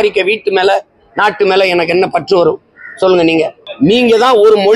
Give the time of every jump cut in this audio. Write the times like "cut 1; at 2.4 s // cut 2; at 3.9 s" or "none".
cut 1; at 3.6 s